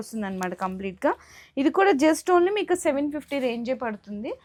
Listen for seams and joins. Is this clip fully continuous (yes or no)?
yes